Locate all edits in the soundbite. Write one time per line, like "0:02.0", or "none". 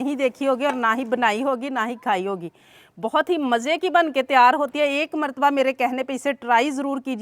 none